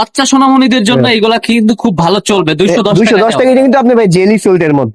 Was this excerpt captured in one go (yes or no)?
yes